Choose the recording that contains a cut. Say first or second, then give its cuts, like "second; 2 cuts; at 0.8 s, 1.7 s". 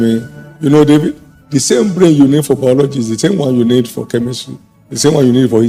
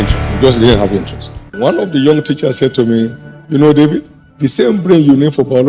second; 1 cut; at 1.5 s